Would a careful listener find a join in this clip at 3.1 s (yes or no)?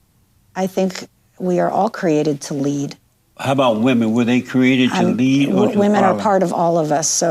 no